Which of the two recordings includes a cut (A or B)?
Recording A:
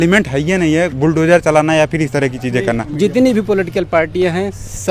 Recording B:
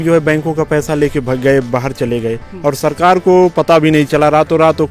A